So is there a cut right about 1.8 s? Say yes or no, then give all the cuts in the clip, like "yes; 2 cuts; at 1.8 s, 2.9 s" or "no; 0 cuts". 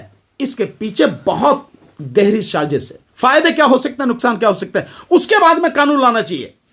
no; 1 cut; at 3.0 s